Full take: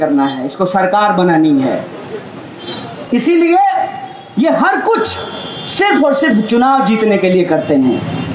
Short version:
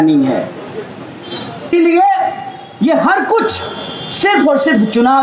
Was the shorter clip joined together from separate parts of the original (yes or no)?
yes